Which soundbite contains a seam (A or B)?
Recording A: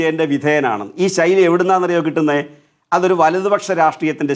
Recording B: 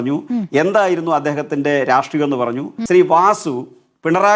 B